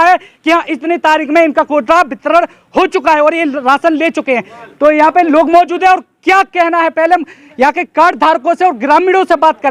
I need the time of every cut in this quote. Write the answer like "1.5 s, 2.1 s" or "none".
none

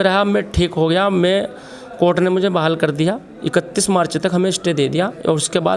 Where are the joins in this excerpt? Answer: none

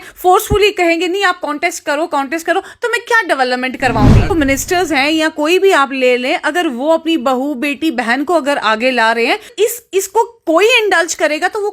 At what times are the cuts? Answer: 4.3 s, 9.5 s

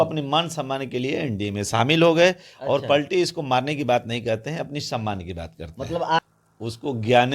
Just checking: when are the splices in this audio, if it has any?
6.2 s

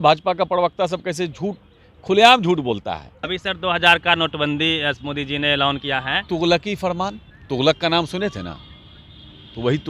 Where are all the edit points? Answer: 3.3 s, 5.8 s, 7.3 s

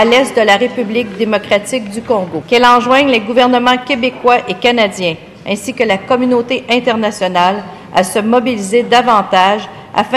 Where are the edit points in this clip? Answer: 2.4 s

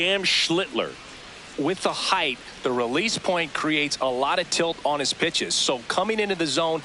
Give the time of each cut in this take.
1.0 s

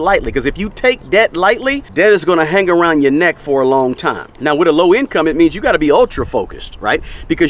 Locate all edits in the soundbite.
1.8 s, 4.2 s

